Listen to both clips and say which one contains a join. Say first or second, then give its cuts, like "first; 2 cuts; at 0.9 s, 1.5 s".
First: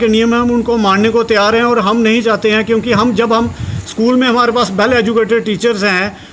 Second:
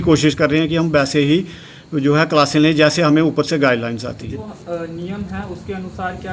second; 1 cut; at 4.4 s